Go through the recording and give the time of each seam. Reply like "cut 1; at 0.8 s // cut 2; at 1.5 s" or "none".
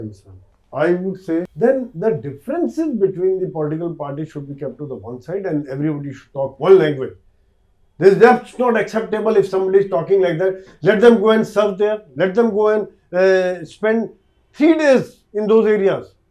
cut 1; at 1.5 s